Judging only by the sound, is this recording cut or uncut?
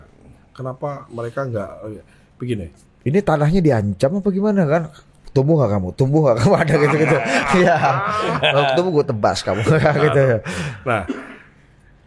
uncut